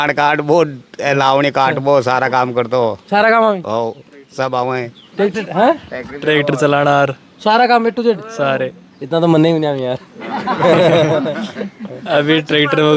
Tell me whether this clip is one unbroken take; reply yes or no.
yes